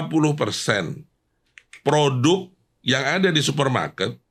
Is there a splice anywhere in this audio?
no; 0 cuts

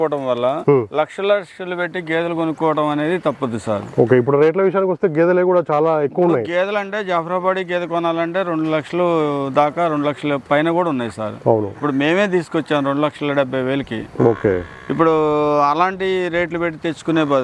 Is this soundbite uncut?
yes; 0 cuts

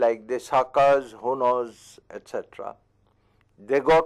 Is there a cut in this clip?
no; 0 cuts

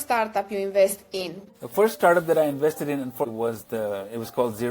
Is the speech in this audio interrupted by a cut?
yes; 2 cuts; at 1.4 s, 3.2 s

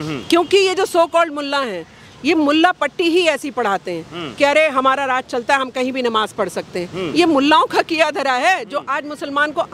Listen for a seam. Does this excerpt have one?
no; 0 cuts

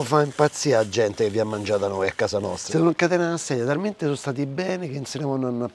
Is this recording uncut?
no; 1 cut; at 2.6 s

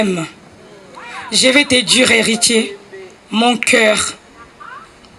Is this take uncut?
yes; 0 cuts

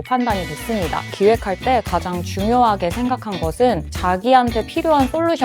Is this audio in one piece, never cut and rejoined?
no; 2 cuts; at 1.1 s, 3.9 s

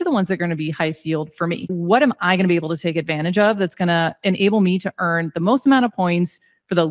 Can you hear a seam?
yes; 1 cut; at 1.7 s

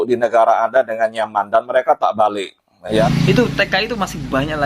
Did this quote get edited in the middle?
yes; 1 cut; at 3.0 s

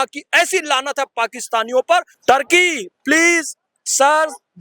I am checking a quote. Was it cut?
yes; 1 cut; at 2.1 s

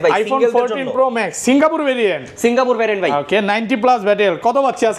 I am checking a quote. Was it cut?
no; 0 cuts

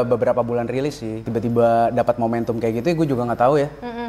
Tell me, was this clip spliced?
yes; 1 cut; at 1.3 s

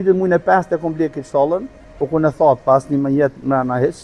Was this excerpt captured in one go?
yes; 0 cuts

